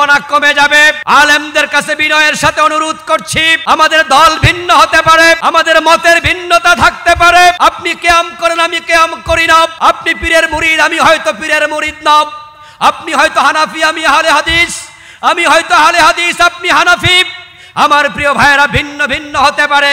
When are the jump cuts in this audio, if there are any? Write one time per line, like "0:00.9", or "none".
0:01.0
0:03.5
0:05.4
0:07.6
0:09.7